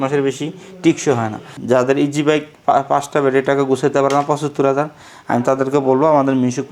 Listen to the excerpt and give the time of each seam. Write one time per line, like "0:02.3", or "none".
0:01.5